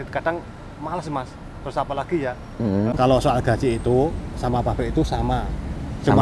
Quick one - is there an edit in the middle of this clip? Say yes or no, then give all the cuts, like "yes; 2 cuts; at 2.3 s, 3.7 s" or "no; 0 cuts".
yes; 1 cut; at 3.0 s